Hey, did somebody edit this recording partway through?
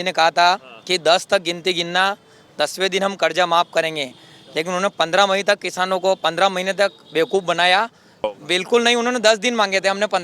yes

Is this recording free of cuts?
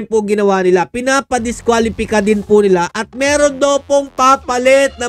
yes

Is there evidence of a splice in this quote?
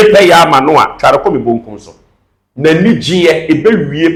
no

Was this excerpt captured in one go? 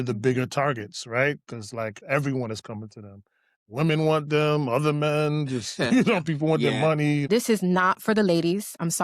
no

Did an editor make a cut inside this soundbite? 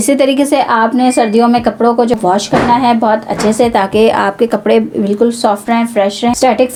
no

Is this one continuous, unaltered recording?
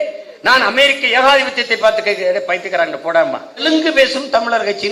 no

